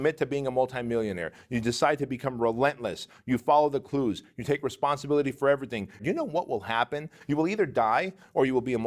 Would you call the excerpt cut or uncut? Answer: cut